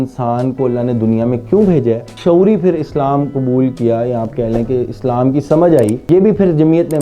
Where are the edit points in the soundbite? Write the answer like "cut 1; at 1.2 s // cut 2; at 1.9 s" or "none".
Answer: cut 1; at 2.1 s // cut 2; at 6.0 s